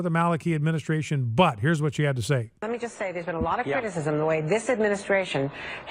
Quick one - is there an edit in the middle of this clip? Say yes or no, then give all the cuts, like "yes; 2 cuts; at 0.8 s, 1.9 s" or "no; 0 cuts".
no; 0 cuts